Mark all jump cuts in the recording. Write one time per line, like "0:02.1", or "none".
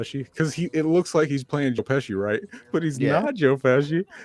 0:03.2